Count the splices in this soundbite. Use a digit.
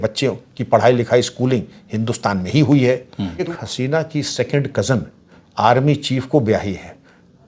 1